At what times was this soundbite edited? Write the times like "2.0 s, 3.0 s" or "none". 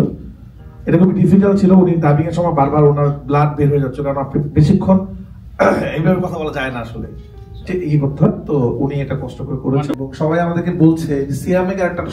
10.0 s